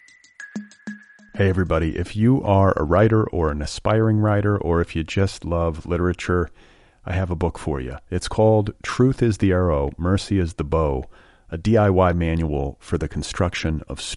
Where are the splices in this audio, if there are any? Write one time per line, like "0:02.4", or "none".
0:00.9